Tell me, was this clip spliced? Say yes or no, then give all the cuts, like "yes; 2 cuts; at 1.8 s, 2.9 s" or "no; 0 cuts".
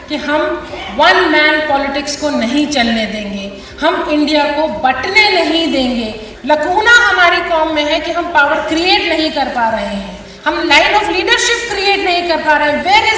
yes; 1 cut; at 6.2 s